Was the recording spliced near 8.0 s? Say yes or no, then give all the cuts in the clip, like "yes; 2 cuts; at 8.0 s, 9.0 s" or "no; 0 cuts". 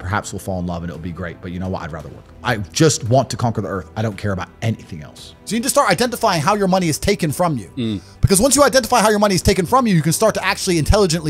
no; 2 cuts; at 2.4 s, 5.3 s